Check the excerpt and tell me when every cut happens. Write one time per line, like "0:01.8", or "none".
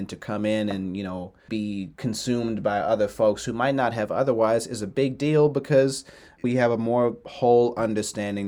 0:01.5
0:06.4